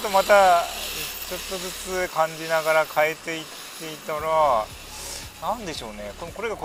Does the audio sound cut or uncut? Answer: uncut